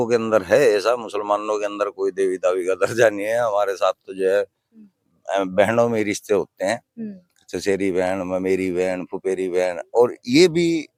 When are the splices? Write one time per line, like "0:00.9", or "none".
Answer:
none

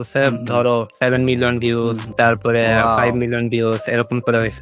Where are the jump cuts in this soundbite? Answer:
0:00.9
0:02.0

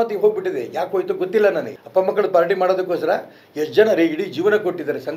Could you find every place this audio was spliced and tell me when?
0:01.8

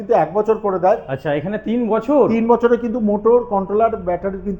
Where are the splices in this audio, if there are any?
none

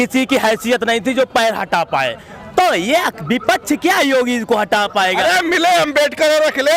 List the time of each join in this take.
none

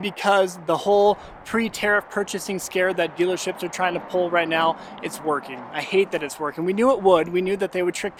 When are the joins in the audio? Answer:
none

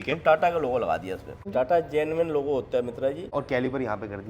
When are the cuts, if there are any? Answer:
0:01.4
0:03.3

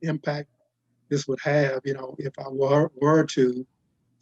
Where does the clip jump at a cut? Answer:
none

